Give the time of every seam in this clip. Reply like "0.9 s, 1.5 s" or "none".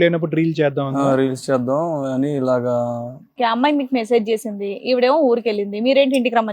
3.3 s